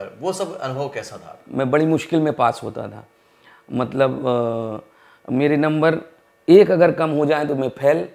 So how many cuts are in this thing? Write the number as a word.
one